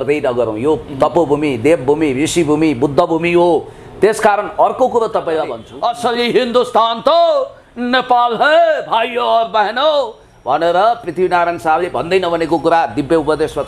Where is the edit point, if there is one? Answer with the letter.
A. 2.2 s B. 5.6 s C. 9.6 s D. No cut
B